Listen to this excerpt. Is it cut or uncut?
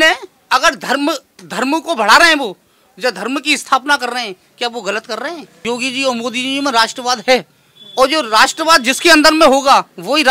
cut